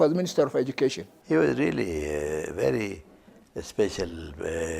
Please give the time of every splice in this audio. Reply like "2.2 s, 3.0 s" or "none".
1.1 s